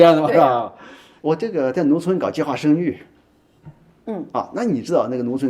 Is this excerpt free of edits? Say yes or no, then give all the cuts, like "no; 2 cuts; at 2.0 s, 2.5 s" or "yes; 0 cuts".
yes; 0 cuts